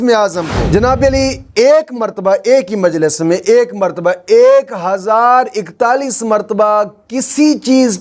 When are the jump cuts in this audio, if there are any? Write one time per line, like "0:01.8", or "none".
none